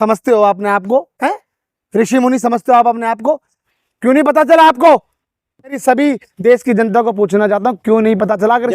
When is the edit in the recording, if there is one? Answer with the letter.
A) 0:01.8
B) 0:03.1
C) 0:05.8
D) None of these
C